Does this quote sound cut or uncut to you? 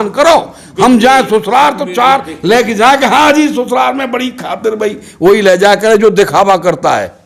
uncut